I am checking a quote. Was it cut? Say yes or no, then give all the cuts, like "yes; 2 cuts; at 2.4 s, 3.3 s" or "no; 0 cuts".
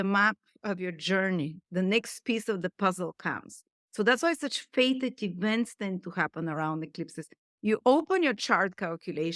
yes; 1 cut; at 7.5 s